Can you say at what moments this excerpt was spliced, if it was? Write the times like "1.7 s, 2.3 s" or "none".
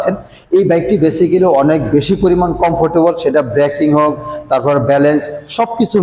none